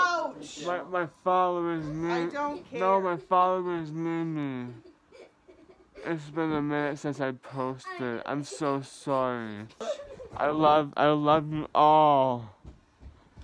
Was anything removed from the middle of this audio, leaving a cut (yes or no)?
yes